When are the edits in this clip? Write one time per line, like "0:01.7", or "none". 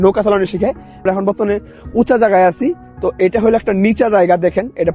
0:01.0